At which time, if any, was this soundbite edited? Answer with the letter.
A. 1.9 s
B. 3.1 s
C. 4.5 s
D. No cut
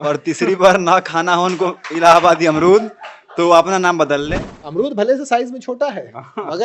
C